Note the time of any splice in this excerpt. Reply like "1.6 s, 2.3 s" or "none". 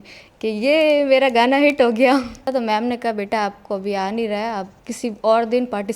2.5 s